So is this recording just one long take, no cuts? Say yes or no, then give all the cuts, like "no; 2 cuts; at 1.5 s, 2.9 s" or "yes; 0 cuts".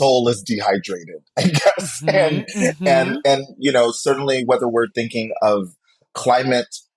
no; 1 cut; at 6.1 s